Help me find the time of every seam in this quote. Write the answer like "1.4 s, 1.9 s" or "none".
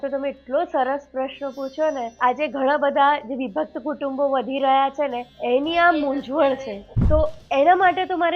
2.2 s, 5.3 s, 6.7 s